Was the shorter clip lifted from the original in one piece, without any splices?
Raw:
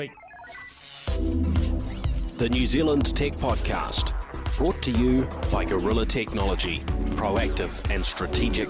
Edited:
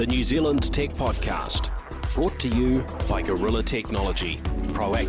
yes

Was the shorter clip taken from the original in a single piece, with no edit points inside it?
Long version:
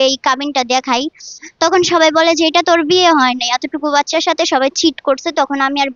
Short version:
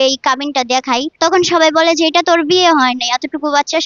no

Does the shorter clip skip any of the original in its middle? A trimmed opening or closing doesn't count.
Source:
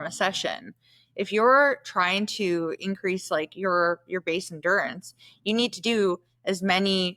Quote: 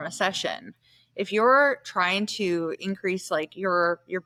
no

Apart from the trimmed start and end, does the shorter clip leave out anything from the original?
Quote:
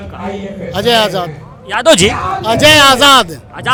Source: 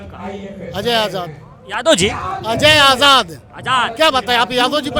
no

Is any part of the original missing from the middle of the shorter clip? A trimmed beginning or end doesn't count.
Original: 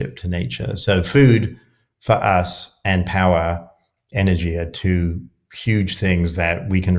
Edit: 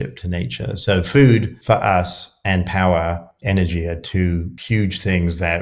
yes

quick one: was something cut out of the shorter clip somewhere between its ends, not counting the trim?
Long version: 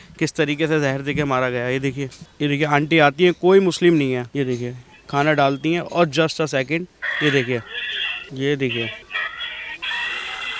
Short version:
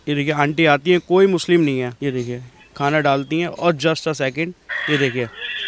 no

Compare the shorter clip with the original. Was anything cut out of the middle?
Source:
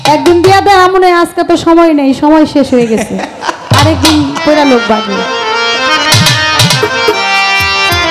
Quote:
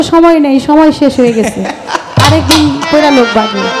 no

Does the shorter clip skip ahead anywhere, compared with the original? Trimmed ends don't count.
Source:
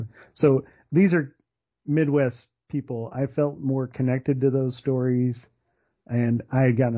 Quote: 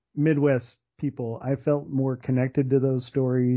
no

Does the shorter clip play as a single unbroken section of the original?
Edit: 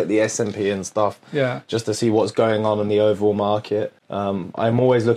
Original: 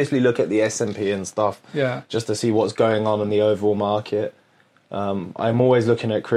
no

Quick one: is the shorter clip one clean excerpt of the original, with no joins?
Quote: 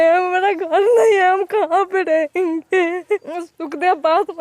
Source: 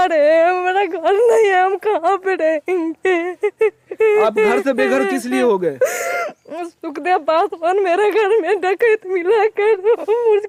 no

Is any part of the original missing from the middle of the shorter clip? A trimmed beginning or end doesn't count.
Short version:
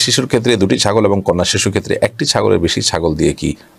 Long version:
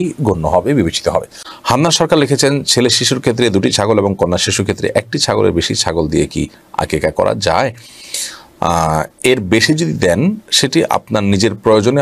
no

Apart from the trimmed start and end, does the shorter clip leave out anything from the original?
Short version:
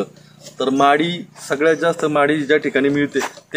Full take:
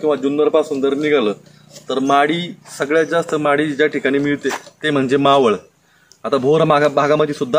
no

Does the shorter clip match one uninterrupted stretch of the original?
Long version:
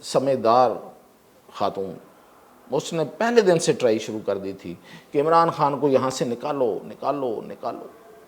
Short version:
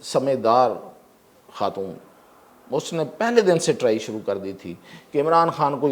yes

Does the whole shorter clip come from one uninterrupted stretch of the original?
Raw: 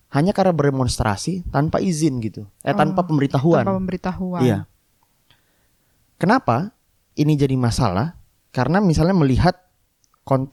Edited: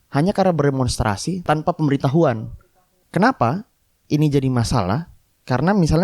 no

